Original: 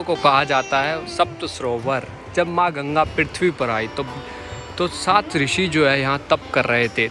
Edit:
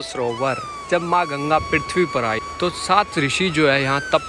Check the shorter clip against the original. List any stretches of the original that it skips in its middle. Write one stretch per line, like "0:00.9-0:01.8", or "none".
0:03.9-0:04.6